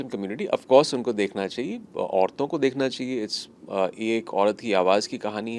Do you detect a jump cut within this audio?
no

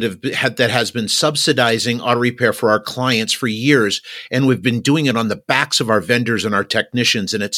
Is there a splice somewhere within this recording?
no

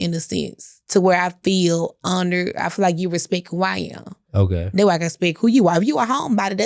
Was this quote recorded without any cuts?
yes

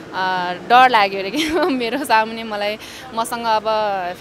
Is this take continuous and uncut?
yes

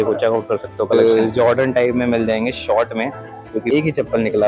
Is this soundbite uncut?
no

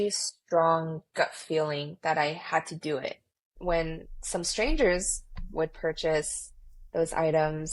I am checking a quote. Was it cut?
yes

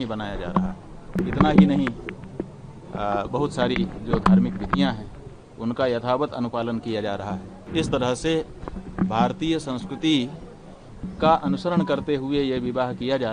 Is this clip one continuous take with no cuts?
no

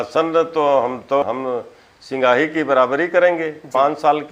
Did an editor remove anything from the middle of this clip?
yes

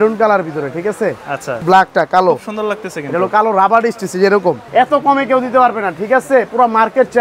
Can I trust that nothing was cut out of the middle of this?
no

